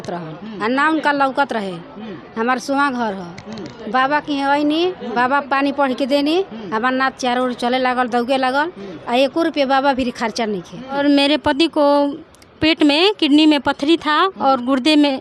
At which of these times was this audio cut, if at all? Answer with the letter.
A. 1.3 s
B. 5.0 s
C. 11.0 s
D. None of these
C